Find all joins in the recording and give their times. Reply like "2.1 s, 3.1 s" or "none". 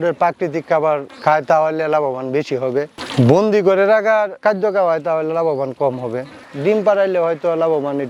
none

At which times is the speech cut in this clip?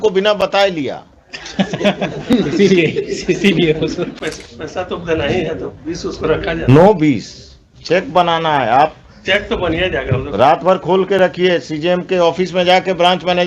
4.2 s

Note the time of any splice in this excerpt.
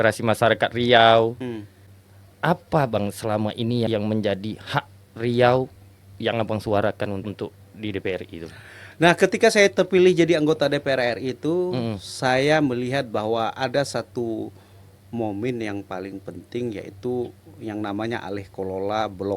1.4 s

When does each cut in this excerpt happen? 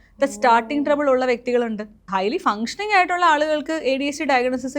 2.0 s

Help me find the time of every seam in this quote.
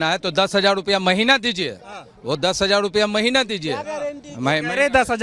none

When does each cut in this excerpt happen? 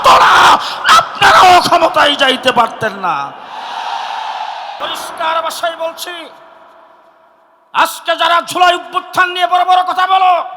4.8 s

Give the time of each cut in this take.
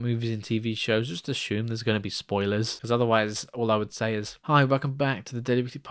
2.7 s

